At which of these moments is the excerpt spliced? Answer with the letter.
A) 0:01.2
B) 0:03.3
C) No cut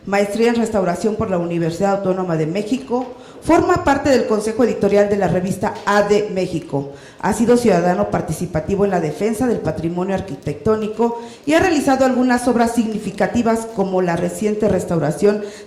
C